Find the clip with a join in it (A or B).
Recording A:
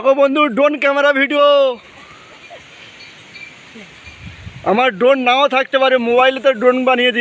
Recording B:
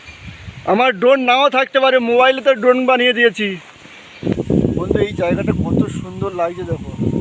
B